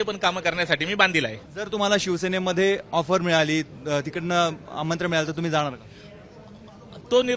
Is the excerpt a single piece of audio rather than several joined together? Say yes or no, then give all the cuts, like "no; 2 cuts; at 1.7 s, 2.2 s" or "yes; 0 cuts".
no; 1 cut; at 1.5 s